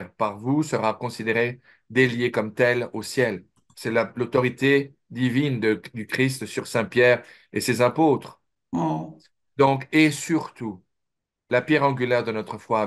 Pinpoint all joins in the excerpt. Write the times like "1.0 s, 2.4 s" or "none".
none